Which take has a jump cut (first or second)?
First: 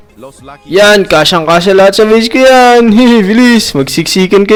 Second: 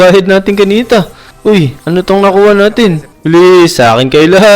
second